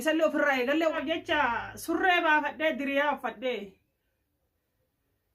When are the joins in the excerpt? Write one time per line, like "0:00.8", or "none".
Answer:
0:00.9

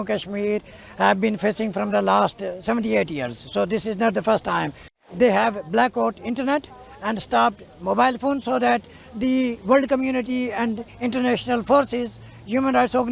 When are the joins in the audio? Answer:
0:05.1

